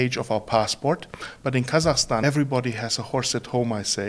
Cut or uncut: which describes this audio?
cut